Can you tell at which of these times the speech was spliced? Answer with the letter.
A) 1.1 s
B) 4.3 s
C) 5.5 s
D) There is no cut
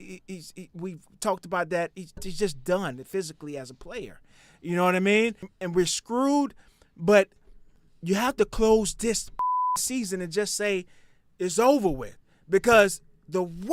C